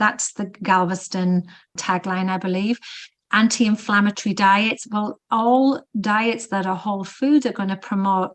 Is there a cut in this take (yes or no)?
no